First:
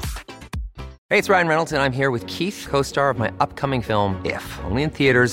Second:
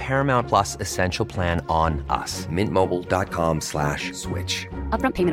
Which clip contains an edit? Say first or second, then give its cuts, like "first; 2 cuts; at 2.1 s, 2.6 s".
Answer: first; 1 cut; at 1.0 s